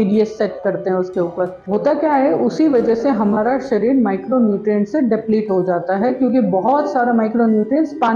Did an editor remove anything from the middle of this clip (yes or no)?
yes